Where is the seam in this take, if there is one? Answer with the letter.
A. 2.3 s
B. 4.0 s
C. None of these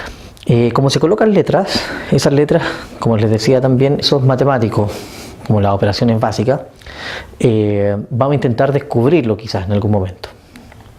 C